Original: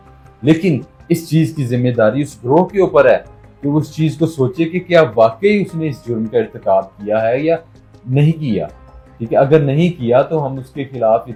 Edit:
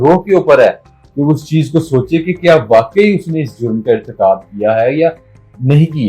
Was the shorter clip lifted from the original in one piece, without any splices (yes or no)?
yes